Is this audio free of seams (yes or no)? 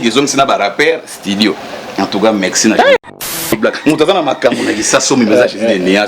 no